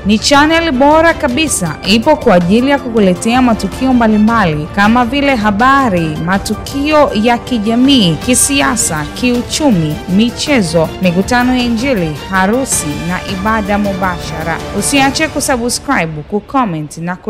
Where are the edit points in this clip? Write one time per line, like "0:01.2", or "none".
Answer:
none